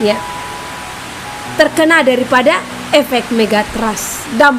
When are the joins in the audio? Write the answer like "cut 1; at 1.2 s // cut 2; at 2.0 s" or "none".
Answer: none